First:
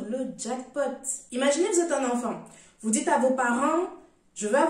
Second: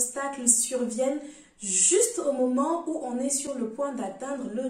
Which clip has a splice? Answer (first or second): first